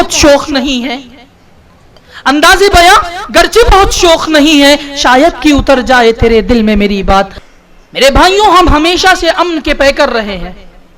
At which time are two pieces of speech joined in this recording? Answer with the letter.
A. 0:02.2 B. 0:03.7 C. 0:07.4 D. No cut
C